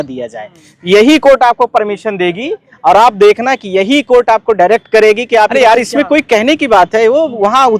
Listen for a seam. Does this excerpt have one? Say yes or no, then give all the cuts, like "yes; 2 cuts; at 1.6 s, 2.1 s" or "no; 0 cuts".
yes; 1 cut; at 5.5 s